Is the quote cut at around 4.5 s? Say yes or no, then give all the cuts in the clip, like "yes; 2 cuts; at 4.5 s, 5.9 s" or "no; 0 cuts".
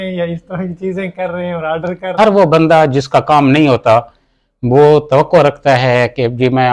no; 1 cut; at 2.1 s